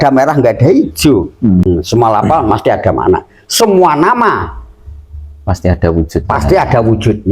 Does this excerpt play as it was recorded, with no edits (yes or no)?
no